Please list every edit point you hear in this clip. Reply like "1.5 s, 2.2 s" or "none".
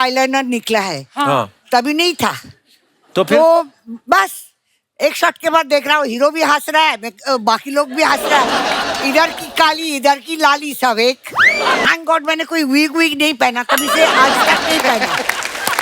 11.8 s